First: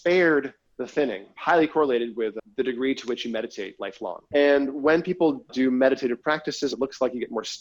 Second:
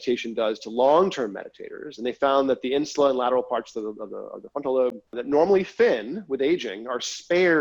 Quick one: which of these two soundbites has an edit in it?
first; 5 cuts; at 1.3 s, 2.4 s, 4.2 s, 5.5 s, 6.7 s

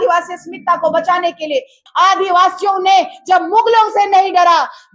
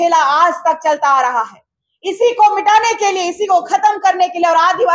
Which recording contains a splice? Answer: first; 1 cut; at 1.8 s

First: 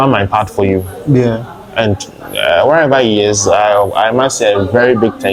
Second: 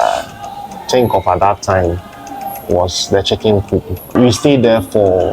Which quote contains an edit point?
second; 1 cut; at 4.0 s

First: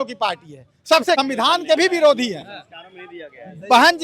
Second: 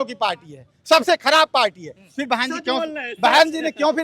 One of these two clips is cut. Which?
first; 1 cut; at 1.2 s

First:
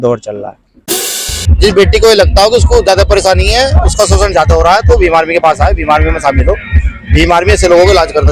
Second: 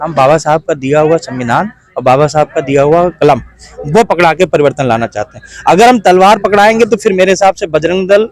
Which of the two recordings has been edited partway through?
first; 1 cut; at 1.0 s

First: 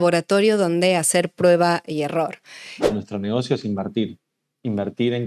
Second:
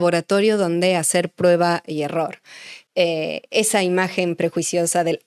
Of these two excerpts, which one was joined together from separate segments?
first; 1 cut; at 2.9 s

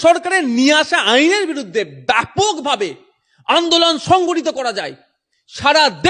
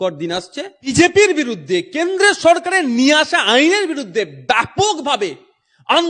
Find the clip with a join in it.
second; 1 cut; at 0.9 s

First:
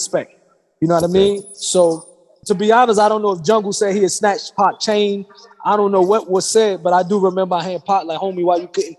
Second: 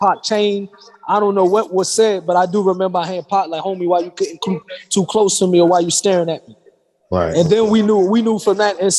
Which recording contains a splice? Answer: first; 1 cut; at 2.3 s

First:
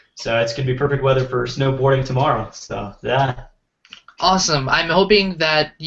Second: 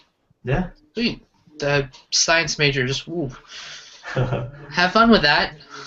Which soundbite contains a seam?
first; 1 cut; at 3.0 s

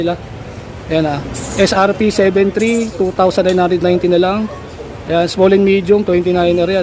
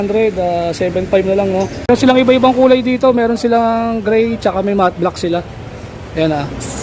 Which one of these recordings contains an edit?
second; 1 cut; at 1.8 s

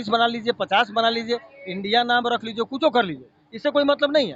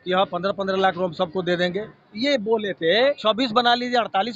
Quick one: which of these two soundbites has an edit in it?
second; 1 cut; at 3.2 s

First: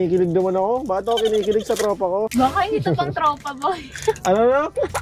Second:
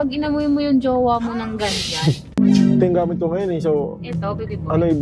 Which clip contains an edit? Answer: second; 1 cut; at 2.3 s

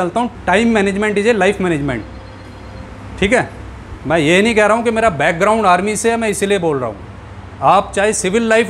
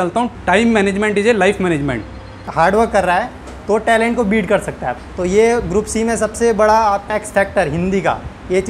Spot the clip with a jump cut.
second; 3 cuts; at 2.5 s, 4.9 s, 7.1 s

